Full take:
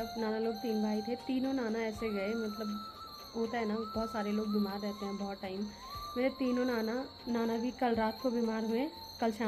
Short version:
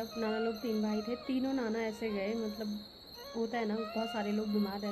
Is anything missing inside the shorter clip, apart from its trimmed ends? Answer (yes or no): no